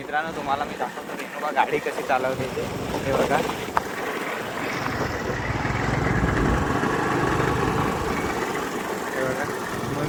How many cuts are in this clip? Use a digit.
0